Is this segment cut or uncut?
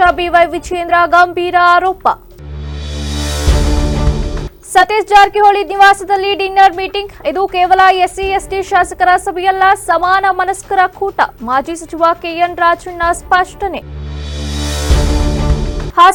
uncut